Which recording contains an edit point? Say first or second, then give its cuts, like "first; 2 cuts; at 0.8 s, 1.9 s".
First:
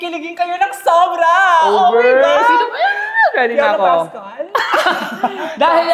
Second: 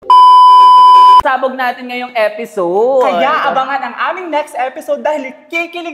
second; 1 cut; at 1.2 s